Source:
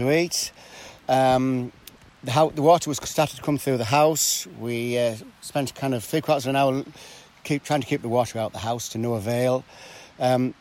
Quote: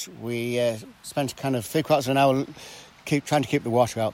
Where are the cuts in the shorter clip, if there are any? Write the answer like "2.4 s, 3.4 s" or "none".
none